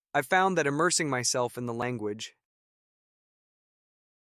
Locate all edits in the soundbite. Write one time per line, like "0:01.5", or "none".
none